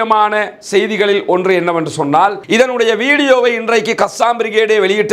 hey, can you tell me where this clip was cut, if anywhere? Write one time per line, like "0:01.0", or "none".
0:02.4